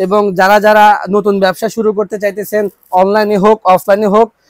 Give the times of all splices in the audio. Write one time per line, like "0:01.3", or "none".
none